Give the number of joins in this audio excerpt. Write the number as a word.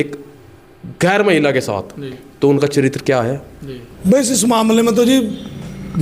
one